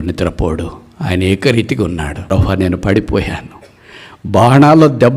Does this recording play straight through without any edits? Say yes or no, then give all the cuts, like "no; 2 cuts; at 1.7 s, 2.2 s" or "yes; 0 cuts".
no; 1 cut; at 2.2 s